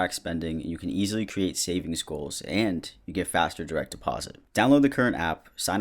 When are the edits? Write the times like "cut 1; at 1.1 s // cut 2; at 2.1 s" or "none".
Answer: cut 1; at 4.4 s